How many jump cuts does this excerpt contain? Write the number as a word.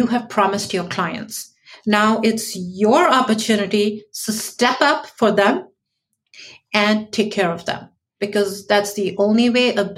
zero